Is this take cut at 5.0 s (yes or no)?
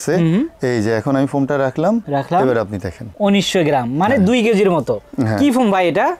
no